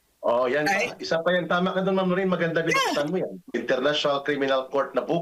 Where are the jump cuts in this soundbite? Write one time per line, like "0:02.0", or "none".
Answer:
0:03.6